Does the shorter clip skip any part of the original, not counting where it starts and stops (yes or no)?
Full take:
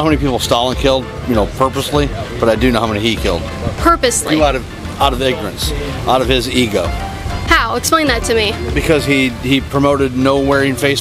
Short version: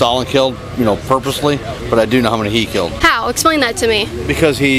yes